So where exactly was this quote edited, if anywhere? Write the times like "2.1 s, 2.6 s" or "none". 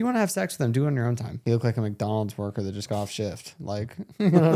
1.3 s